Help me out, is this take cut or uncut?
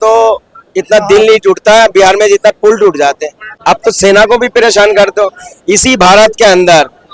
cut